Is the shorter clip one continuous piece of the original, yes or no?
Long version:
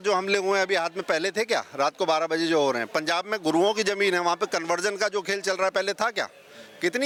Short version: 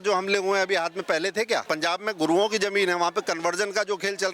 no